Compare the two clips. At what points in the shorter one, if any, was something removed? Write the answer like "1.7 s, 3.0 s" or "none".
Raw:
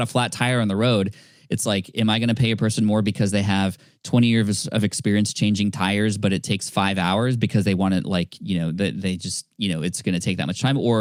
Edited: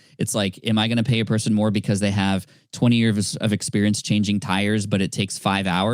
none